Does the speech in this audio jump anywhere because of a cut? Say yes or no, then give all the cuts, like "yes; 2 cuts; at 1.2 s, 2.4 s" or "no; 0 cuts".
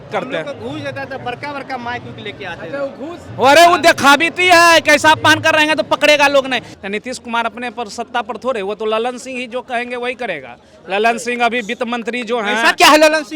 yes; 1 cut; at 6.7 s